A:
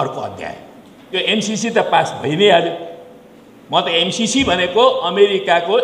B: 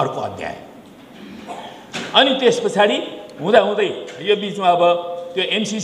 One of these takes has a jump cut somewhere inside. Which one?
A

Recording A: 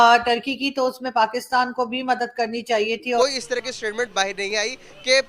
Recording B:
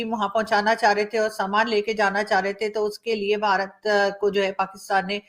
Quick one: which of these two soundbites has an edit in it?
A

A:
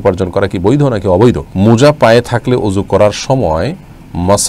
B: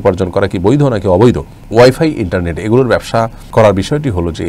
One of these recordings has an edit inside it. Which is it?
A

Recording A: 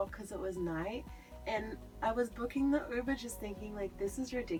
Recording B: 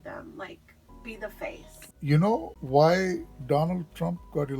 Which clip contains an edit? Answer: B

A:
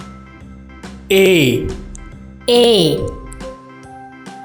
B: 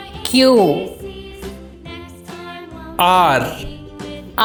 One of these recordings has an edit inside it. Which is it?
A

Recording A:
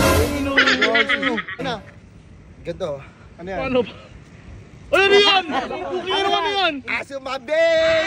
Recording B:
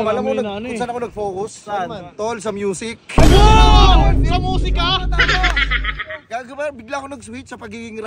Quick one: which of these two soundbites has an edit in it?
A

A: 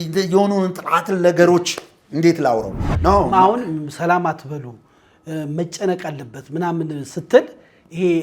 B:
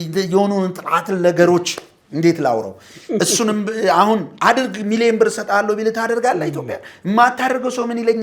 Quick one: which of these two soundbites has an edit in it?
A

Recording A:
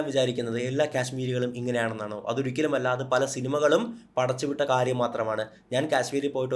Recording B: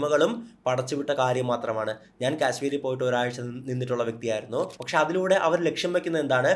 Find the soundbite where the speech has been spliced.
B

